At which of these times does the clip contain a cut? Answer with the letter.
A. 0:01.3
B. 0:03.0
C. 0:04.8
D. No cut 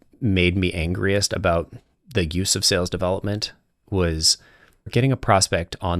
C